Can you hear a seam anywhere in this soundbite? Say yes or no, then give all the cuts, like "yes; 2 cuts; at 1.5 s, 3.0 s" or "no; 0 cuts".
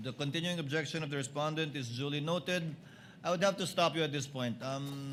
no; 0 cuts